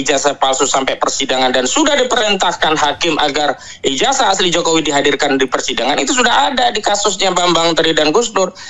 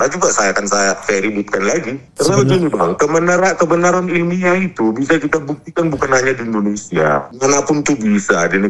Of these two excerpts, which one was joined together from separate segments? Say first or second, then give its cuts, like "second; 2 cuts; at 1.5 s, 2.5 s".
second; 3 cuts; at 1.0 s, 2.0 s, 7.3 s